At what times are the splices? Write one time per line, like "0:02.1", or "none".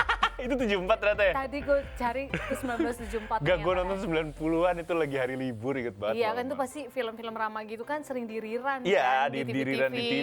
none